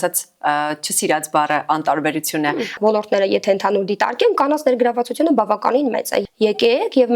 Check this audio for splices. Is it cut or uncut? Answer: cut